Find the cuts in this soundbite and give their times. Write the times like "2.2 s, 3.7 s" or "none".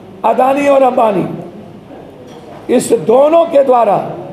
none